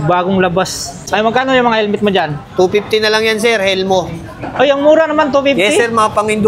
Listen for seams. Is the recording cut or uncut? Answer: cut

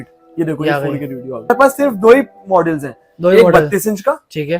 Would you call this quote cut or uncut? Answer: cut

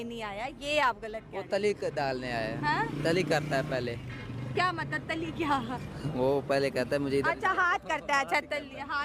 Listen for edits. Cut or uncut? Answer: uncut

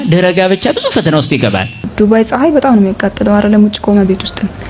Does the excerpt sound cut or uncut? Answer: cut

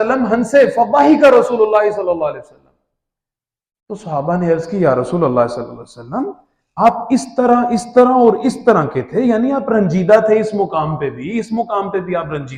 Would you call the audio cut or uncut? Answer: uncut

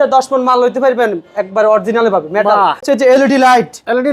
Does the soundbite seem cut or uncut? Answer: cut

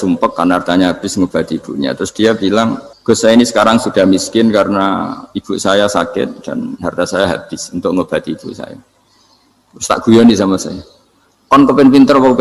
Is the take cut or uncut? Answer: cut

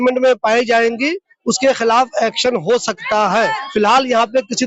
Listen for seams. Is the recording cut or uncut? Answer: cut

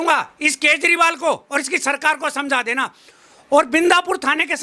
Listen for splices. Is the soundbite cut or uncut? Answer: uncut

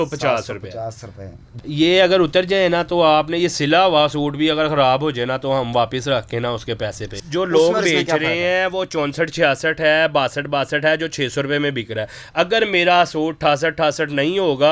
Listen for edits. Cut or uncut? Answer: cut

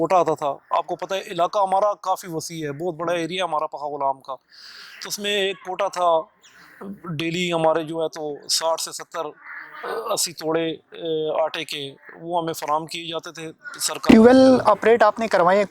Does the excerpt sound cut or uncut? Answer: cut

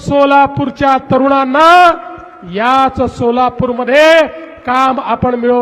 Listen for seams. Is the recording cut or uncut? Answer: uncut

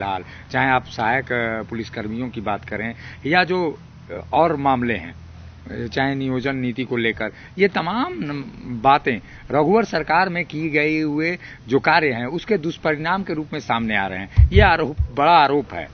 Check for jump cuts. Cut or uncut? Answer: uncut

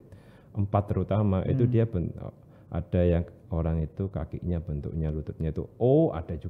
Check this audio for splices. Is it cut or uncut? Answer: uncut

